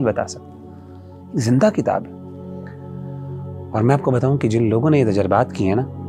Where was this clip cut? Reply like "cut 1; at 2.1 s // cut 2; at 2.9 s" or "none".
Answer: none